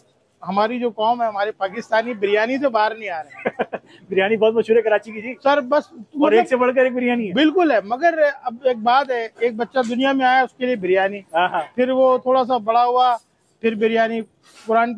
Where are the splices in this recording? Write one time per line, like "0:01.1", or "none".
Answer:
none

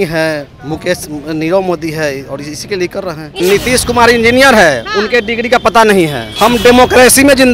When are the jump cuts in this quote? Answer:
0:03.3
0:06.2

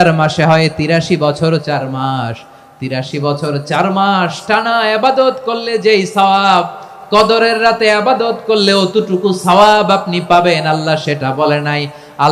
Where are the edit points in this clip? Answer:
none

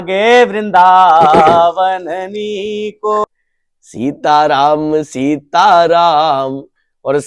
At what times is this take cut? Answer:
0:03.2

